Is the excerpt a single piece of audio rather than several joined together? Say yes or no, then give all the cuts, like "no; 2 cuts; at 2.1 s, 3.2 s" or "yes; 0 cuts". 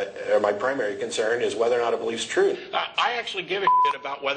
no; 1 cut; at 2.6 s